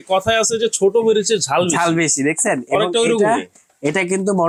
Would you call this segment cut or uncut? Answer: uncut